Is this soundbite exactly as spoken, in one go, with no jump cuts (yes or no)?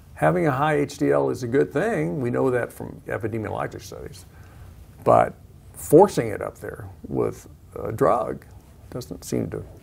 no